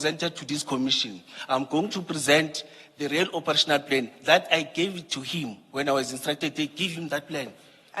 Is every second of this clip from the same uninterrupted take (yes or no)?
yes